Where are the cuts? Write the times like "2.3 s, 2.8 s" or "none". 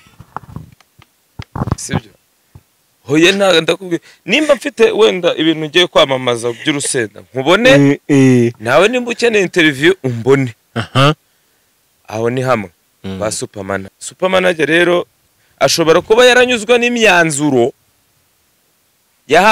13.9 s

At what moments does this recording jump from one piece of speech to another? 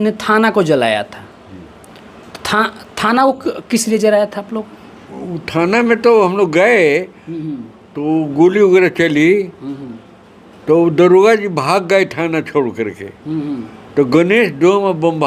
none

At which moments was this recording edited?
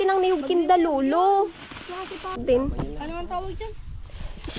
2.4 s

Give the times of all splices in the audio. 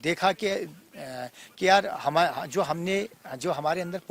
none

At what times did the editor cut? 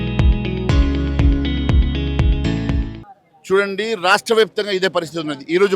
3.0 s

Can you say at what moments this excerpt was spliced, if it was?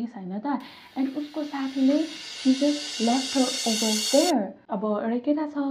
4.6 s

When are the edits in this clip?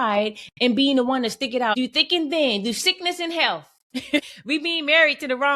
1.8 s, 4.3 s

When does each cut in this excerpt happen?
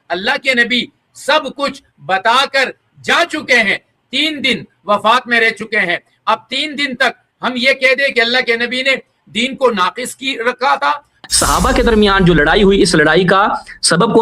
11.2 s

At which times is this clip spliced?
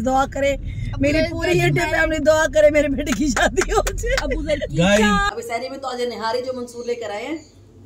5.3 s

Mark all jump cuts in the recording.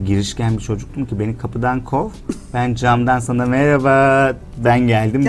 none

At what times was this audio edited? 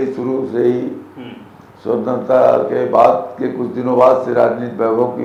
none

